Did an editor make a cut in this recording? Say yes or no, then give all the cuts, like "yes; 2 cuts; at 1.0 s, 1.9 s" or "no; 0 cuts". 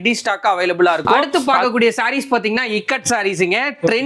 yes; 1 cut; at 1.3 s